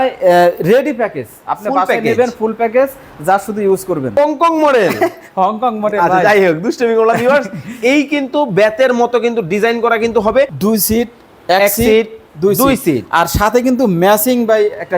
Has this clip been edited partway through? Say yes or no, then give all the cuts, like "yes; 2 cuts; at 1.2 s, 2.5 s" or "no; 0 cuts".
yes; 2 cuts; at 4.1 s, 10.5 s